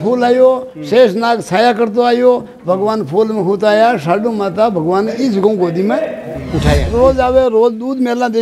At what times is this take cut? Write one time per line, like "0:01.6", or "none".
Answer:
0:06.9